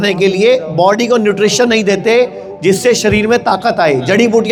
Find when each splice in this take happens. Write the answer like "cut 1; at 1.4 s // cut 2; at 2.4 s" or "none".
none